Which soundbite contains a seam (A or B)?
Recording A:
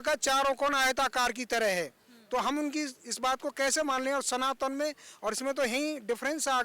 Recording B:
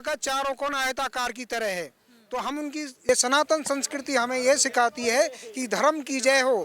B